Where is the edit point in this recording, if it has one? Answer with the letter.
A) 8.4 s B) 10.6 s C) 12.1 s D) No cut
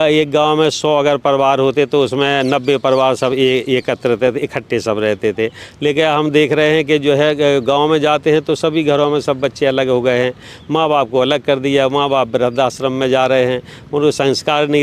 D